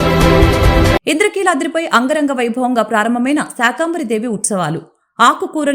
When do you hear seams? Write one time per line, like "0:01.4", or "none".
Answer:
none